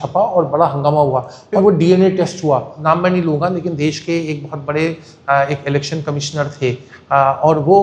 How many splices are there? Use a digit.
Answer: 2